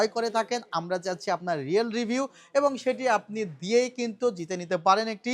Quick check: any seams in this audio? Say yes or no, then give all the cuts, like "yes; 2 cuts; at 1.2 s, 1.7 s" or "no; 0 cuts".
no; 0 cuts